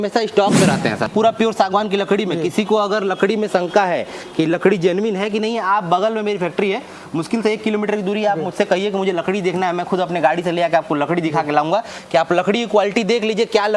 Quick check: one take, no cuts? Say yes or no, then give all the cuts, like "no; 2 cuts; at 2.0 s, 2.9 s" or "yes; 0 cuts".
no; 1 cut; at 1.1 s